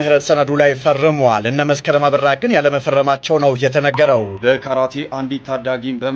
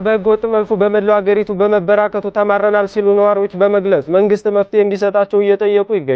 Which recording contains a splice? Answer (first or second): first